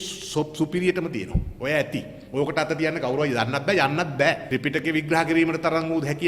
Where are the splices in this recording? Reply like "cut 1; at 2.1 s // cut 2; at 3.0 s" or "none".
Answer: cut 1; at 4.4 s